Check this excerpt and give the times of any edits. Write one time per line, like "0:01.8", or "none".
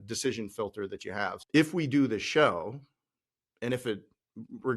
0:01.4